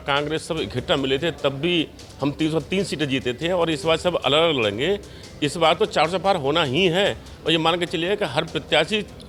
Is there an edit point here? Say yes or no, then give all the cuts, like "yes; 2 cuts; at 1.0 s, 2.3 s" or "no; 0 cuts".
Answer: no; 0 cuts